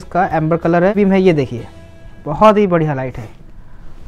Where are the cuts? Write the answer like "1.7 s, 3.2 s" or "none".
1.0 s